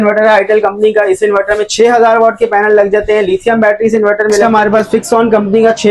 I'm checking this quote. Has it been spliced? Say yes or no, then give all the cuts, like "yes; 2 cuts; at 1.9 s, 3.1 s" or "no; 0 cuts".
yes; 1 cut; at 4.4 s